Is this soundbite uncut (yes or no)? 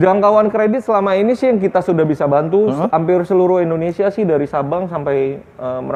yes